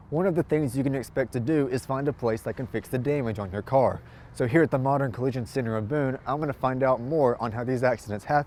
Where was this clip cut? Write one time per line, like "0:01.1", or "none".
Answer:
none